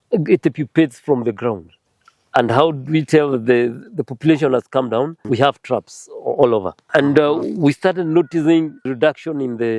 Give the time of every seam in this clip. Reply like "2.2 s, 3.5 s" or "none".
1.7 s, 5.2 s, 6.9 s, 8.9 s